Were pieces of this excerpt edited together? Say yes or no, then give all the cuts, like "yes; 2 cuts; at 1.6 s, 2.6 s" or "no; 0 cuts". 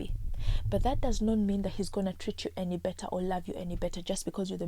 no; 0 cuts